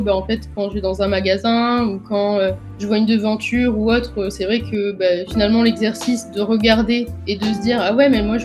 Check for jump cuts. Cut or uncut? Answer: uncut